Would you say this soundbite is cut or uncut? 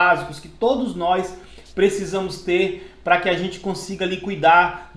uncut